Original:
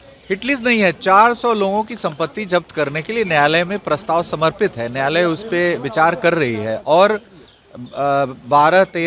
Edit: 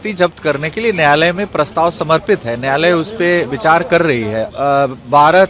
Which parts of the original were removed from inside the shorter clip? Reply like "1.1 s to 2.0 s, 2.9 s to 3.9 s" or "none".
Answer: 6.8 s to 7.8 s

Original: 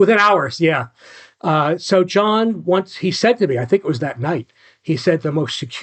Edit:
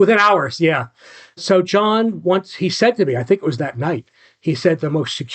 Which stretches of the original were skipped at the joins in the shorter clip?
1.4 s to 1.8 s

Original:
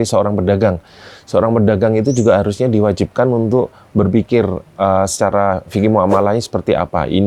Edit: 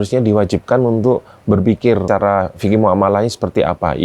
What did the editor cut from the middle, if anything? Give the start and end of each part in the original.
4.5 s to 5.1 s

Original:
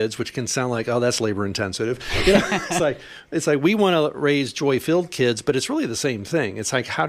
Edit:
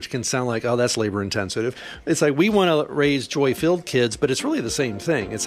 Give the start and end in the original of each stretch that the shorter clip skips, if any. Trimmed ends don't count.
2.1 s to 3.1 s

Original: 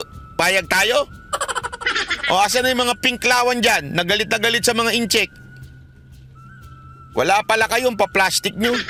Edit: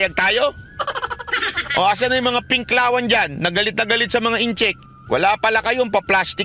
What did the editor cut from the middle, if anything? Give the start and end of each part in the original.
5.4 s to 6.9 s

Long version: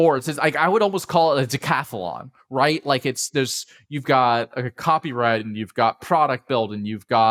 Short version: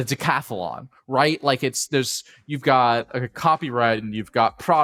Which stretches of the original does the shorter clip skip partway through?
none

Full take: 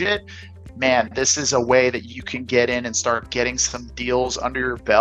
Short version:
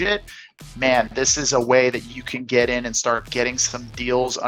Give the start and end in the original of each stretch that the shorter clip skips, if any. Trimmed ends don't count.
none

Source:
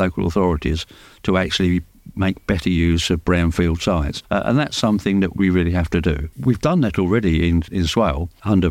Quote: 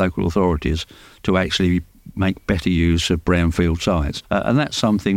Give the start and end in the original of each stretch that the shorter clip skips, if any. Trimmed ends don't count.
none

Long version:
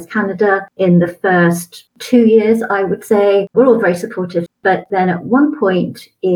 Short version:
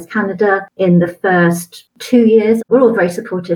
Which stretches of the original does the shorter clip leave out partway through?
2.6 s to 3.5 s

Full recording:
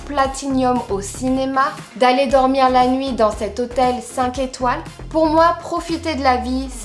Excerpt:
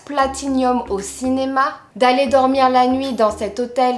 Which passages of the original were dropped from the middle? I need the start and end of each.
none

